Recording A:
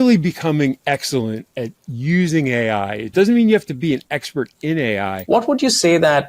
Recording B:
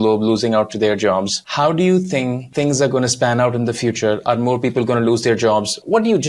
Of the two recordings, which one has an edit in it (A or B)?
A